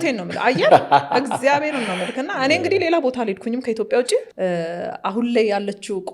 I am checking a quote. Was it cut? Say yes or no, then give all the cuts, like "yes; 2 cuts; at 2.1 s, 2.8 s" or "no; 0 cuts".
yes; 1 cut; at 4.3 s